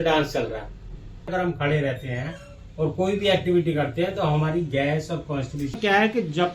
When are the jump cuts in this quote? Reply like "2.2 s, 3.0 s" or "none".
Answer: 1.3 s, 5.8 s

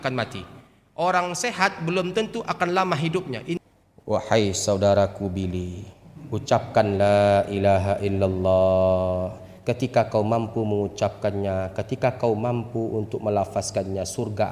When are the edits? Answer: 3.6 s

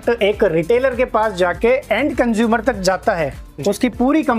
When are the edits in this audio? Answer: none

